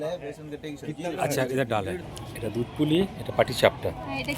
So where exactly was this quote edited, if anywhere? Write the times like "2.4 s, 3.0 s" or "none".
2.3 s